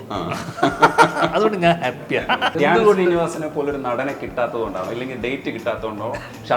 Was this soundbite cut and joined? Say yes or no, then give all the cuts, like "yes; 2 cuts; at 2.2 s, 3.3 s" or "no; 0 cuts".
yes; 1 cut; at 2.5 s